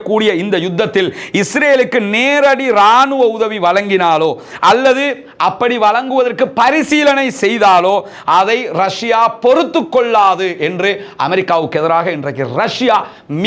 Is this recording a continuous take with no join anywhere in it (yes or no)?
yes